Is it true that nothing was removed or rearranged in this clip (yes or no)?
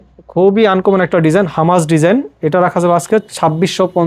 yes